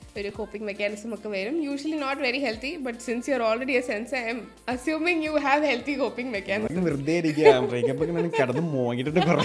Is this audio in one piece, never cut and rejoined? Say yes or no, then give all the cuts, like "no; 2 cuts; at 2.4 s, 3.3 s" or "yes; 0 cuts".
yes; 0 cuts